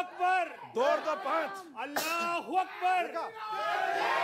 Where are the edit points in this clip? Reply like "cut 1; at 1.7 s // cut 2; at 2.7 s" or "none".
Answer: none